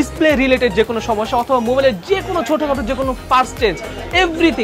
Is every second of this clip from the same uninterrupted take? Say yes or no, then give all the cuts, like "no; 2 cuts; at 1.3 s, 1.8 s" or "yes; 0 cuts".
yes; 0 cuts